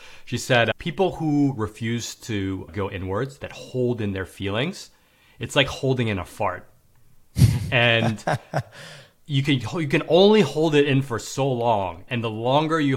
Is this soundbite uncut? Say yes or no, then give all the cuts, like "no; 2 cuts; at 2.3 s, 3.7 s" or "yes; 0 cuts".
no; 3 cuts; at 0.7 s, 2.7 s, 12.0 s